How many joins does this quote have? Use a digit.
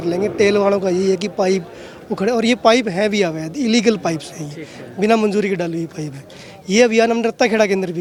0